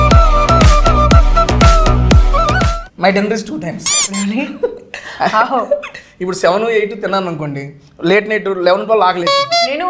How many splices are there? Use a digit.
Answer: 1